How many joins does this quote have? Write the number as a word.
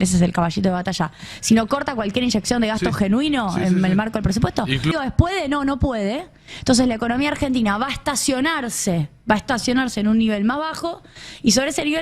one